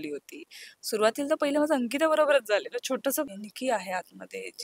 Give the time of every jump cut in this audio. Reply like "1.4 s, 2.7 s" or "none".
3.3 s